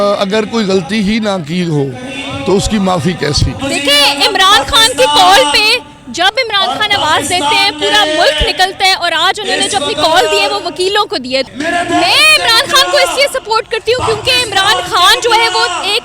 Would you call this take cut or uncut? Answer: cut